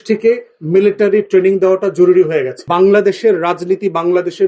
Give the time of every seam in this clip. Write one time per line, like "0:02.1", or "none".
0:02.6